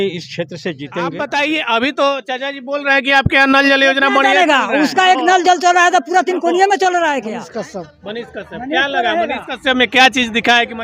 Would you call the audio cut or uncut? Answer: cut